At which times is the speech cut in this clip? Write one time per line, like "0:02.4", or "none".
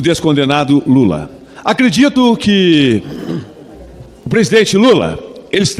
none